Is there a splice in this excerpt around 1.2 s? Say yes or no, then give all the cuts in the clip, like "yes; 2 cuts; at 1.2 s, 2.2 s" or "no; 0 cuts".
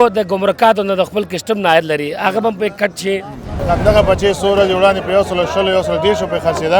no; 1 cut; at 3.5 s